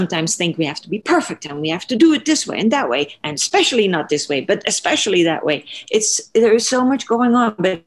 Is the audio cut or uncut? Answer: cut